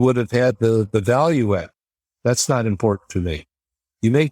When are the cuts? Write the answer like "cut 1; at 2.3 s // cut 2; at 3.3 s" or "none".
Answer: cut 1; at 1.7 s